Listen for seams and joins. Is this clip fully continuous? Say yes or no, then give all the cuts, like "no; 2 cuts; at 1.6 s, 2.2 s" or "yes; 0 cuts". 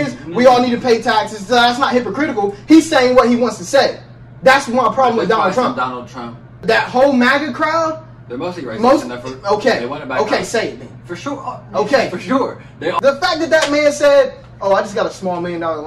no; 2 cuts; at 6.6 s, 13.0 s